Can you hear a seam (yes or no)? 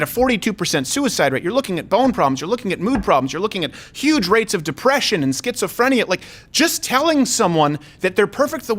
no